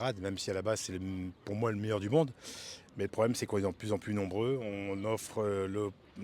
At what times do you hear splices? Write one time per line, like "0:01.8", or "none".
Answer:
none